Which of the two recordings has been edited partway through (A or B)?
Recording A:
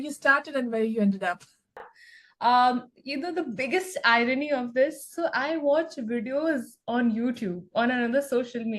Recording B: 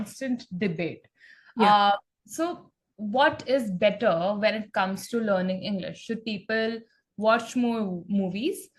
A